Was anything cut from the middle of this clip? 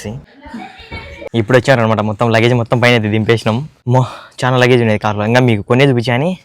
yes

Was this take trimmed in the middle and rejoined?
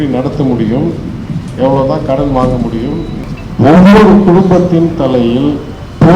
yes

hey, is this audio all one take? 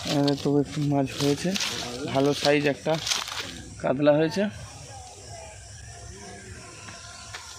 yes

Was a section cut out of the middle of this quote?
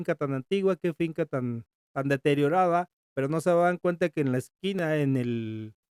no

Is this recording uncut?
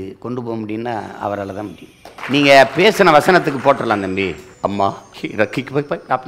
no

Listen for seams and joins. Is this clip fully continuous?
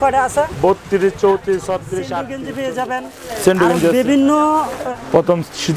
no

